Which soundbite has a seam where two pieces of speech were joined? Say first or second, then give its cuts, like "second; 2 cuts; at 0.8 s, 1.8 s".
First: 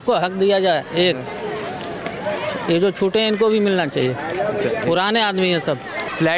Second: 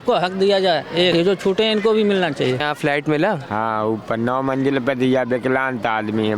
second; 2 cuts; at 1.1 s, 2.6 s